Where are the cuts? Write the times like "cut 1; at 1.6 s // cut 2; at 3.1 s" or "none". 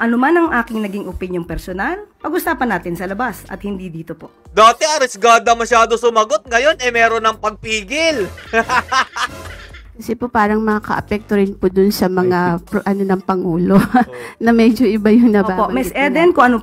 none